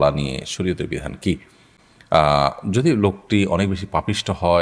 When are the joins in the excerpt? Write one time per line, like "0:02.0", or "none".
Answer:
none